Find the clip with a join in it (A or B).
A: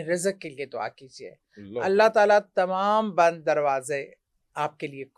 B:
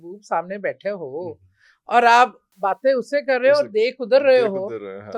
B